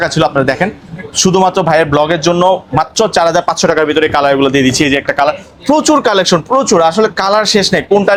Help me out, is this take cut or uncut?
uncut